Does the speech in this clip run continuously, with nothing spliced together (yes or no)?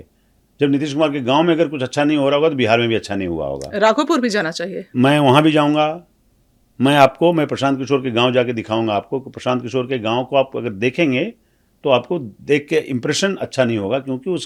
yes